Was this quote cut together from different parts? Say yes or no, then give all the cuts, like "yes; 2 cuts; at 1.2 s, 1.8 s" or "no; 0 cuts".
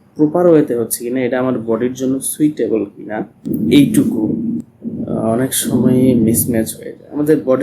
yes; 2 cuts; at 3.5 s, 4.6 s